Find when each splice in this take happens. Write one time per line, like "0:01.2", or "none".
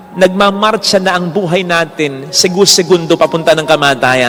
none